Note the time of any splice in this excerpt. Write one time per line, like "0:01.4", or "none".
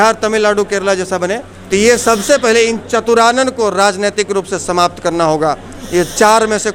0:01.5